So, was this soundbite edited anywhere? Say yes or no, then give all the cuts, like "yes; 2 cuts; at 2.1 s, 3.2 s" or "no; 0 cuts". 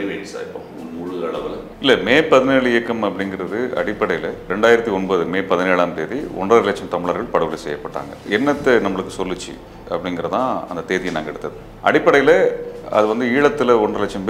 yes; 2 cuts; at 4.5 s, 8.2 s